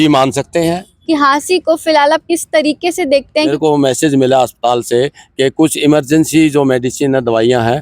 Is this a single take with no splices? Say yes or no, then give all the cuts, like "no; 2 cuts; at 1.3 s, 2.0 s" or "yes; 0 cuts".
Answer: no; 2 cuts; at 0.9 s, 3.5 s